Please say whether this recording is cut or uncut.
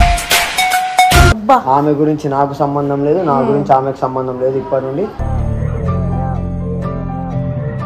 cut